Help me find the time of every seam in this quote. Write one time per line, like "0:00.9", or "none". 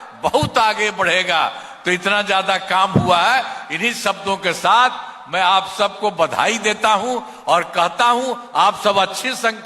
none

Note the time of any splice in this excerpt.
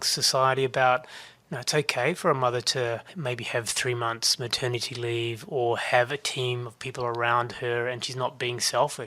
0:03.1

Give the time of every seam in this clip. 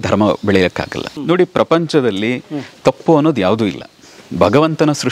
0:01.0

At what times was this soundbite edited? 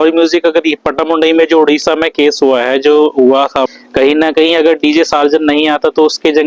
none

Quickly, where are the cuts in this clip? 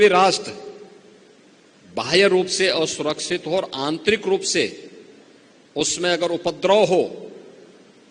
none

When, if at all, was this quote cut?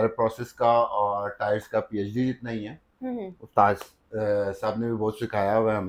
none

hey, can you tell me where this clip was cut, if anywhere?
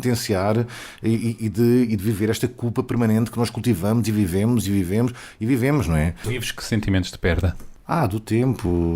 0:06.3
0:07.7

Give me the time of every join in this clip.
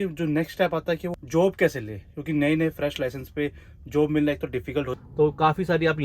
0:01.1
0:04.9

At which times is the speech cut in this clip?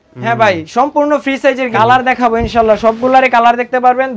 0:01.7

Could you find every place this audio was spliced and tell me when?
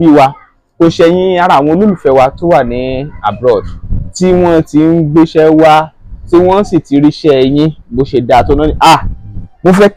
none

